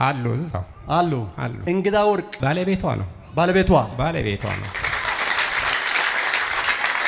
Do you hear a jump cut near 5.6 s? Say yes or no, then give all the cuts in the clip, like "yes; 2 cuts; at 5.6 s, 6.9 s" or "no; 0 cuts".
no; 0 cuts